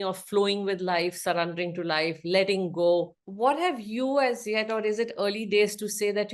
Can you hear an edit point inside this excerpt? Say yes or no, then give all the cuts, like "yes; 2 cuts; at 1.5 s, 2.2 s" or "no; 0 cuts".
yes; 1 cut; at 3.2 s